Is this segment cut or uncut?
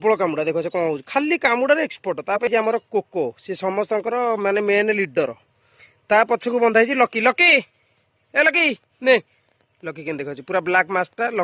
cut